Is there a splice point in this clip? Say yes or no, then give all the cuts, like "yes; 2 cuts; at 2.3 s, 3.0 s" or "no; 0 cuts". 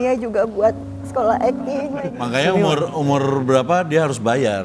yes; 1 cut; at 2.1 s